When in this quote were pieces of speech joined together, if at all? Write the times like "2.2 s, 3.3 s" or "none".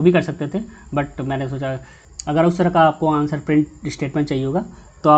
2.0 s